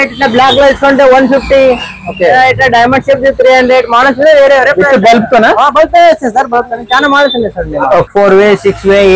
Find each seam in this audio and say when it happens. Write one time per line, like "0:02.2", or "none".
0:08.1